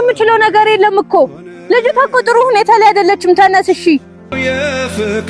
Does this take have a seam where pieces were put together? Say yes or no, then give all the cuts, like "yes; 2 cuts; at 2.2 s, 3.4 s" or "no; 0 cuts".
yes; 1 cut; at 4.4 s